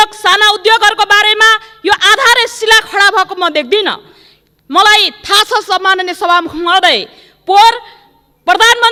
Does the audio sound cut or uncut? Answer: uncut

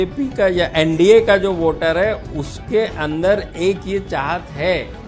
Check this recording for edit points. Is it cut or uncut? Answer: uncut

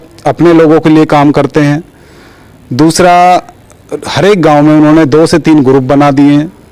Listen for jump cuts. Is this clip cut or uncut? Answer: uncut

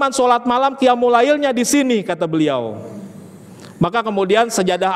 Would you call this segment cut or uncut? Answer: uncut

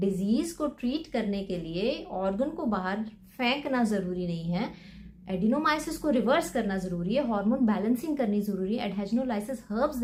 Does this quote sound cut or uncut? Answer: uncut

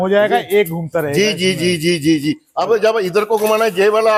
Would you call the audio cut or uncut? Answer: uncut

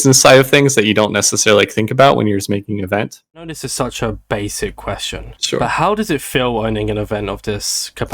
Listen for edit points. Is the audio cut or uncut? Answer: cut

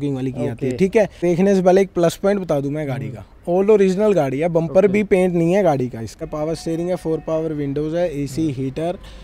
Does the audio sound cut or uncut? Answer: cut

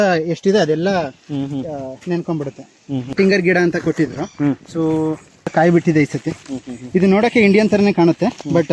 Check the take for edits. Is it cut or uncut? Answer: cut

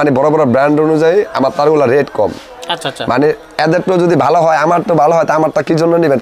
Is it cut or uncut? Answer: uncut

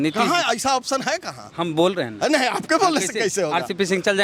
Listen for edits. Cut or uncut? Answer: uncut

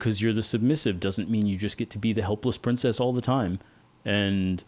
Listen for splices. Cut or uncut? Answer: uncut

